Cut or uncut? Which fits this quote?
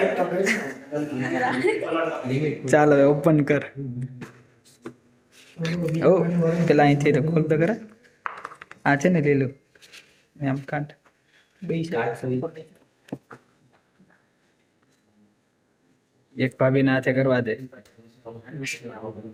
uncut